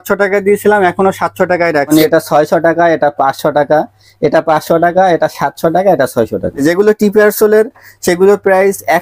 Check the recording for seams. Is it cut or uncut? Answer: cut